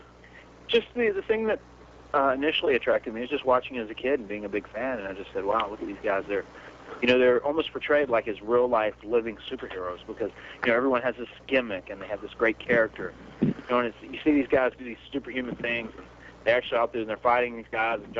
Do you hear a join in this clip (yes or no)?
no